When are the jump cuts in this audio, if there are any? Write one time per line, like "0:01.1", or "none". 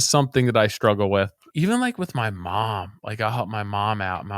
0:01.5

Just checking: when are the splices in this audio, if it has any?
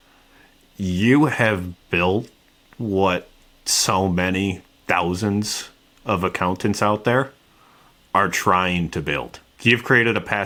none

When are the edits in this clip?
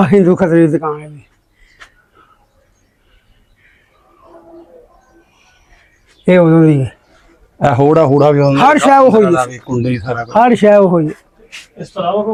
none

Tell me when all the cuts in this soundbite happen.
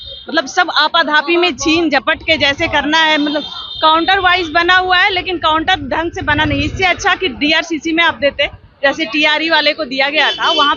none

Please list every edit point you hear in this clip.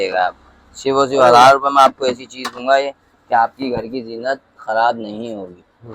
none

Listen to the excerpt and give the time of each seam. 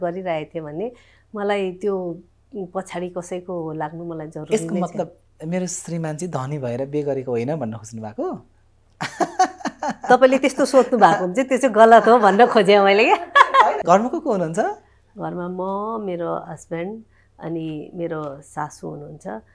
0:13.6

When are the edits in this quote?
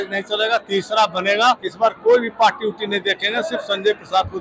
0:01.7

